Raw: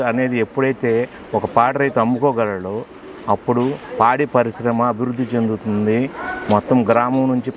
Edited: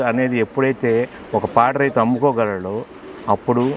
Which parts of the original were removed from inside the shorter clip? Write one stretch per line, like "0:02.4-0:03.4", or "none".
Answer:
none